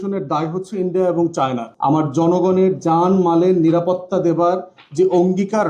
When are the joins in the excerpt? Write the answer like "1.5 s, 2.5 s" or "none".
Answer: 1.7 s